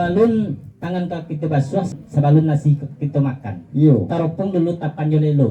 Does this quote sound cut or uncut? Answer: cut